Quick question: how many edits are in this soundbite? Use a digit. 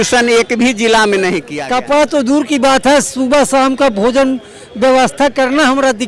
1